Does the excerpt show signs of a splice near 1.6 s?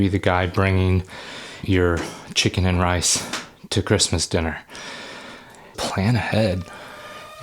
yes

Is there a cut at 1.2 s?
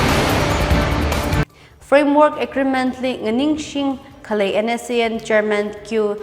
yes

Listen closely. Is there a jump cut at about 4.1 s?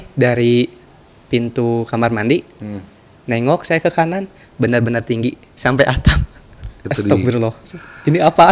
no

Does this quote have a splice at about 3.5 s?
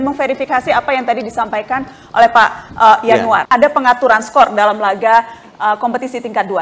yes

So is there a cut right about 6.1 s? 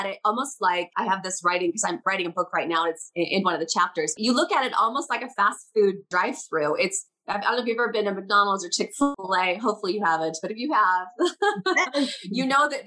yes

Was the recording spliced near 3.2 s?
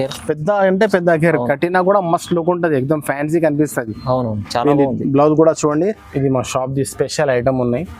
no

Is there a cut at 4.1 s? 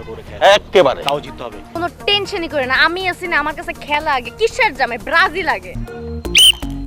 no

